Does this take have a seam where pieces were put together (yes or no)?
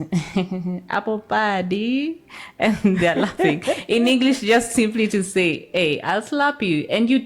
no